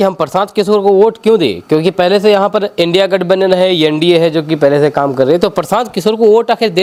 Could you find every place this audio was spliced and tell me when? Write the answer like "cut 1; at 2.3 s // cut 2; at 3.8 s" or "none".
none